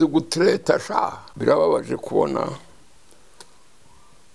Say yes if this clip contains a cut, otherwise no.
yes